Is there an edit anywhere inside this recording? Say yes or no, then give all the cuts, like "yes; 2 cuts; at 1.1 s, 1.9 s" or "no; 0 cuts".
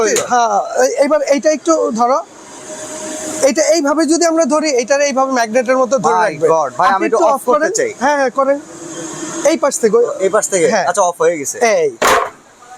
no; 0 cuts